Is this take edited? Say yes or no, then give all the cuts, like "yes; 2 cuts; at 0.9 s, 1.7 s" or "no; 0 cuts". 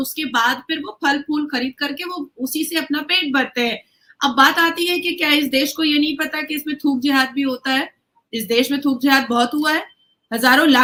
no; 0 cuts